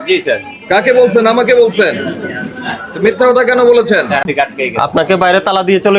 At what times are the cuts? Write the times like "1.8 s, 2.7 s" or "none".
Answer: 4.2 s